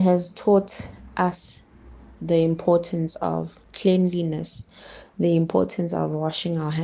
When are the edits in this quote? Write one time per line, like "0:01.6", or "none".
none